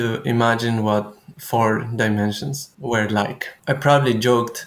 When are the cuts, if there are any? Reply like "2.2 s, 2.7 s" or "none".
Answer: 2.5 s, 3.5 s